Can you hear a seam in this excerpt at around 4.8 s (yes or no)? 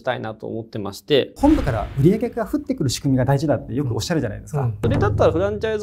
yes